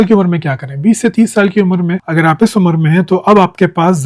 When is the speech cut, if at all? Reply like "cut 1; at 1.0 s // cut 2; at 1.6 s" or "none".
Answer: none